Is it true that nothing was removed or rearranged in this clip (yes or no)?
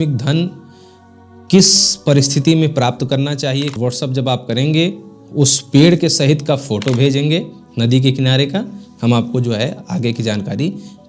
no